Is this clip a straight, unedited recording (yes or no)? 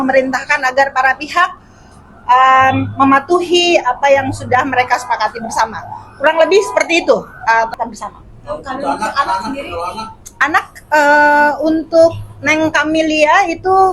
no